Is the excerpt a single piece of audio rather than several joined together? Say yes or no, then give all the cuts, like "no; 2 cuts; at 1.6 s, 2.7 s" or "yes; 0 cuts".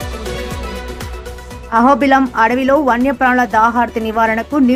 yes; 0 cuts